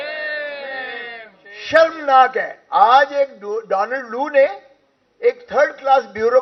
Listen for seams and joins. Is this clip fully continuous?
yes; 0 cuts

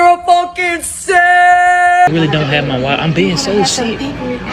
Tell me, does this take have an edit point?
yes; 1 cut; at 2.1 s

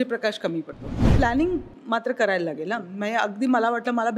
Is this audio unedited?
no; 1 cut; at 1.0 s

